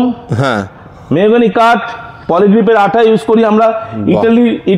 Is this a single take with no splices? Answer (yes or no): yes